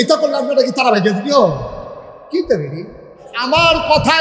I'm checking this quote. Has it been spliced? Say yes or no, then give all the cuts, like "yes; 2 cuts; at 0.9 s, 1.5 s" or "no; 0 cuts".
yes; 1 cut; at 3.3 s